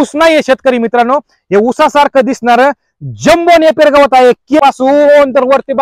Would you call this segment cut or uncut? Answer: cut